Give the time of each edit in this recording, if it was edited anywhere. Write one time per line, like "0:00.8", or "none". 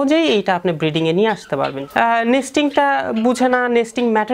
0:01.8